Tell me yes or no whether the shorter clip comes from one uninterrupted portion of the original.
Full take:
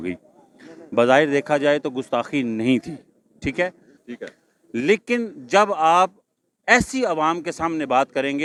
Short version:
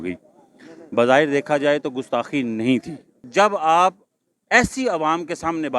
no